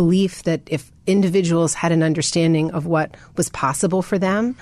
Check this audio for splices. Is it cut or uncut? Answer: uncut